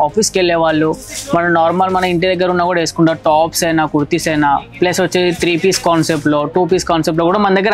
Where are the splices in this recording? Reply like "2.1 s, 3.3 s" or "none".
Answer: none